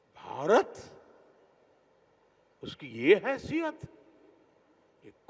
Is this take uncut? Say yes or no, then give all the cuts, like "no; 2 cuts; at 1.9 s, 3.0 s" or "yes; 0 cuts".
yes; 0 cuts